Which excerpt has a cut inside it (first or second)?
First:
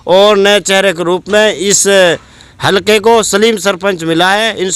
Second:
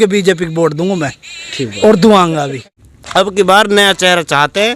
second